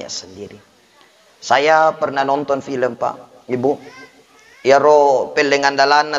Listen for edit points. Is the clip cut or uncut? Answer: uncut